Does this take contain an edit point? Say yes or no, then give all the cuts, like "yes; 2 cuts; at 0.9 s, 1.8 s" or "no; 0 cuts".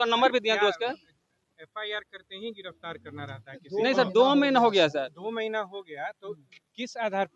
no; 0 cuts